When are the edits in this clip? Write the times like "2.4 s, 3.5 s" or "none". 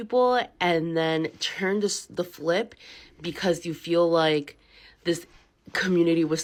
none